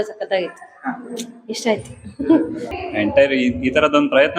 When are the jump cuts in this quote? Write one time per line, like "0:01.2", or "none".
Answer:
0:02.7